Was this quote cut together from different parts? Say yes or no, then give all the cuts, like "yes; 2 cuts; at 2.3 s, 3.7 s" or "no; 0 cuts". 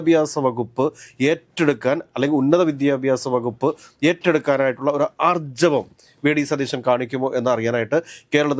no; 0 cuts